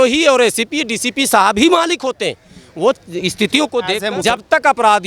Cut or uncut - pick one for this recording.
cut